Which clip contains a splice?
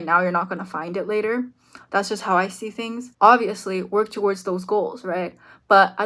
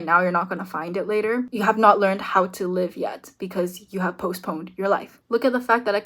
second; 2 cuts; at 1.5 s, 5.1 s

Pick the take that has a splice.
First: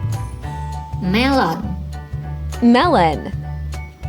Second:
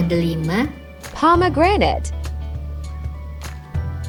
first; 2 cuts; at 1.0 s, 3.3 s

